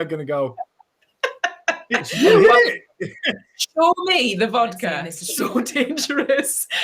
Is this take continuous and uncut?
no; 1 cut; at 5.1 s

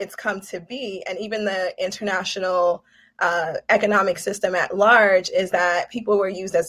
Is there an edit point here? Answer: no; 0 cuts

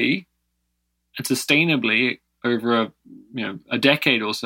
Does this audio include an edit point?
no; 0 cuts

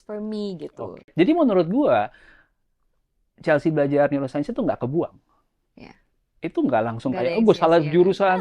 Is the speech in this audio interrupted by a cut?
yes; 1 cut; at 1.1 s

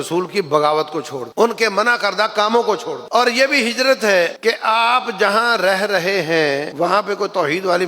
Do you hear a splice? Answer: yes; 4 cuts; at 1.2 s, 3.0 s, 4.4 s, 6.7 s

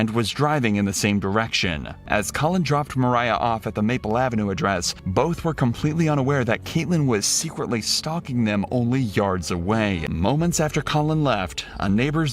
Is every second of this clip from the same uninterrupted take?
no; 2 cuts; at 1.9 s, 10.1 s

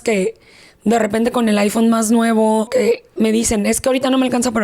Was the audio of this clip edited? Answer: yes; 1 cut; at 2.7 s

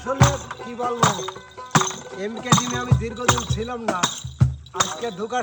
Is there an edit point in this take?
no; 0 cuts

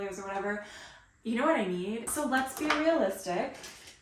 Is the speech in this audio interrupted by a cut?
yes; 1 cut; at 2.0 s

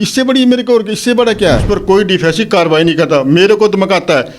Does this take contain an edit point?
yes; 1 cut; at 1.7 s

